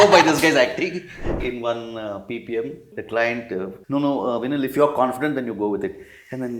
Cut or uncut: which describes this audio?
cut